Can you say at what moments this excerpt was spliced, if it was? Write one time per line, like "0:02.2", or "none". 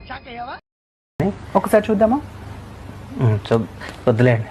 0:01.0